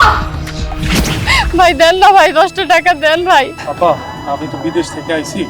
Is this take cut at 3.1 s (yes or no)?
no